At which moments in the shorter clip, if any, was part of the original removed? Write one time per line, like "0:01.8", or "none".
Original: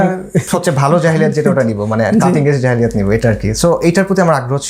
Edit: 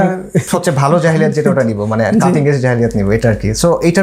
none